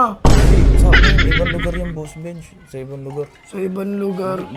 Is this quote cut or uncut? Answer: uncut